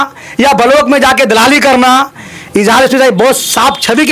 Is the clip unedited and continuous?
yes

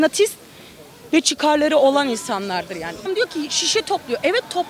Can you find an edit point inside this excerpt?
yes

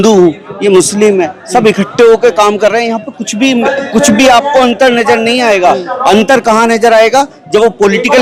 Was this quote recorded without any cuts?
yes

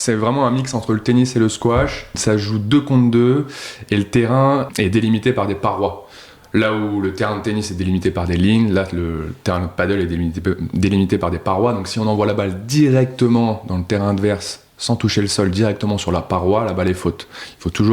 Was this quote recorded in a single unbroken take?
no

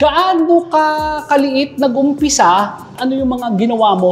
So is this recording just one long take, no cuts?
no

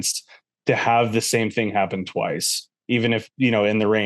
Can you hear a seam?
no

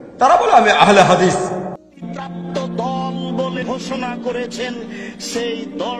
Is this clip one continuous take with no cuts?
no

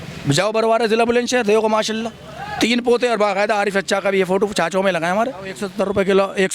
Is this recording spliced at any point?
yes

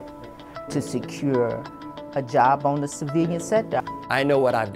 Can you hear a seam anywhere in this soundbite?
yes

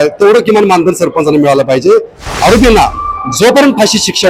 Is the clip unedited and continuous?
no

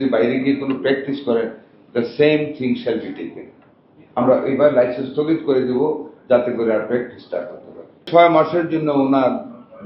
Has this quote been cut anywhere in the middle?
yes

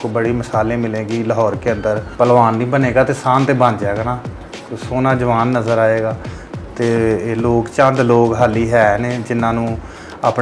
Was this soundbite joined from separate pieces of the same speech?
yes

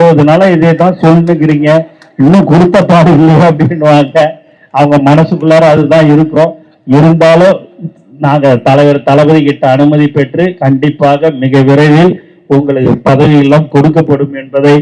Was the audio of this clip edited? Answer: no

